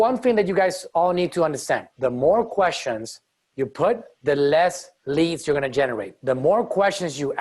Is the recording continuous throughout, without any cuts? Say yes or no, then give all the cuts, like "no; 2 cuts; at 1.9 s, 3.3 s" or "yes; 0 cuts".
no; 4 cuts; at 1.9 s, 4.1 s, 4.9 s, 6.1 s